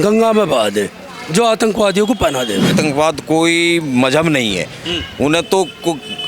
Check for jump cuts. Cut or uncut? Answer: cut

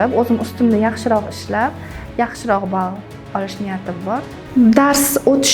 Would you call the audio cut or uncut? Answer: cut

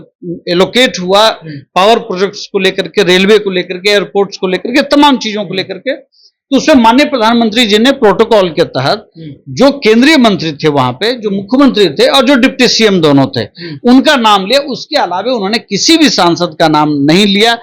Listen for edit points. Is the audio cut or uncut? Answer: uncut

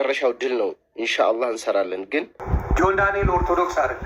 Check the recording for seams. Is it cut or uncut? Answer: cut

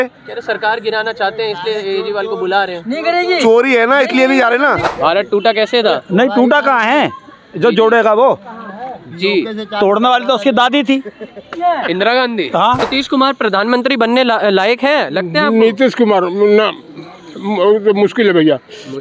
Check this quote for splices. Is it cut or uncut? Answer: cut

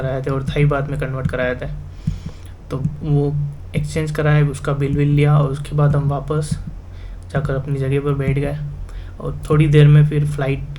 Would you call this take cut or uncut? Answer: uncut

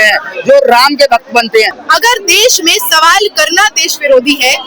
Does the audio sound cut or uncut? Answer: cut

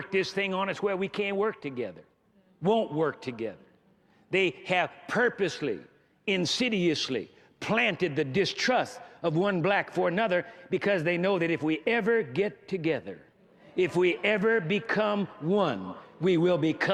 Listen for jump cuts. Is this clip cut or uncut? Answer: uncut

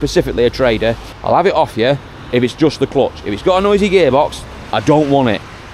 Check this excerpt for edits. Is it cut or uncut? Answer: cut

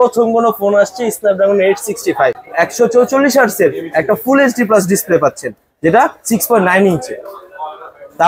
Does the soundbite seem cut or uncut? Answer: cut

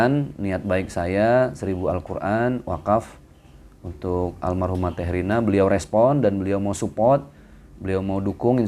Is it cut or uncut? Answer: uncut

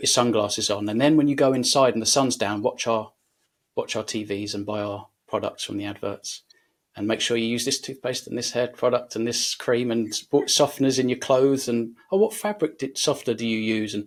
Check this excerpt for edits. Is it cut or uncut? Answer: uncut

